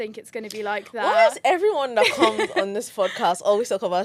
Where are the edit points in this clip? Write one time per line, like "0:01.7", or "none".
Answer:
none